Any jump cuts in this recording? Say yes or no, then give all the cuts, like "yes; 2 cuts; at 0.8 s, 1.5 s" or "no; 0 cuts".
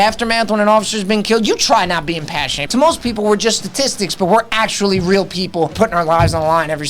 yes; 2 cuts; at 2.6 s, 5.7 s